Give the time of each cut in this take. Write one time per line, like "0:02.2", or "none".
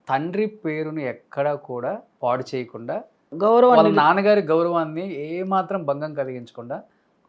0:02.1
0:03.3